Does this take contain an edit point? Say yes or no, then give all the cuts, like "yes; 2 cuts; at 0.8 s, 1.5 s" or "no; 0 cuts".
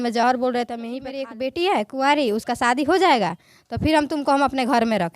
yes; 1 cut; at 1.3 s